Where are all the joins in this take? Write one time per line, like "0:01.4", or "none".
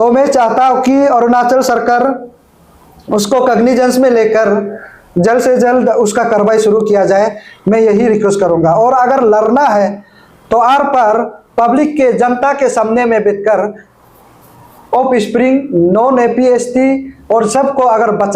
none